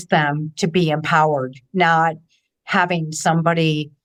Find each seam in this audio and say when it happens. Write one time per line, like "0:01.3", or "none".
none